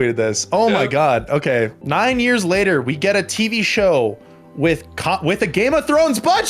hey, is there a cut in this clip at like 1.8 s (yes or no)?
yes